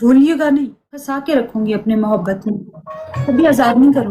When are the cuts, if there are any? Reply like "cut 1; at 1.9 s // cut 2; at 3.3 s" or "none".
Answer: cut 1; at 1.1 s